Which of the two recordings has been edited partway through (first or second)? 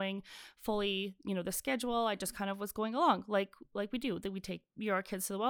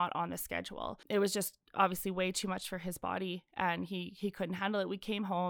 second